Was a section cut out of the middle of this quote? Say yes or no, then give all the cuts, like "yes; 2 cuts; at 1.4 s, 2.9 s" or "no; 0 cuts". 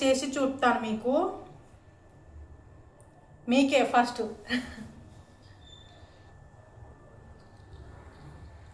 no; 0 cuts